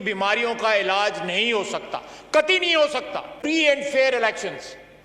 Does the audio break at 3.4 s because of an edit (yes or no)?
yes